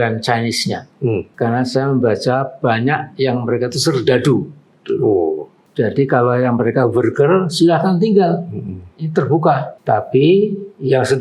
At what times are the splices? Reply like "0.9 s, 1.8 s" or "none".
1.3 s, 5.6 s, 9.7 s